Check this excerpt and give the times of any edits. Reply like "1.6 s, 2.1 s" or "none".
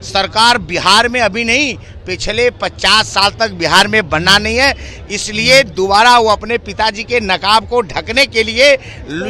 none